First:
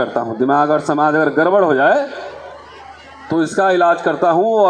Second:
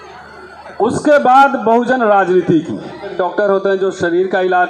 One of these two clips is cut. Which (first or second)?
second